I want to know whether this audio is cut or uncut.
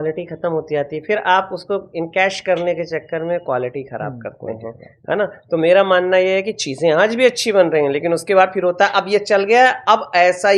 uncut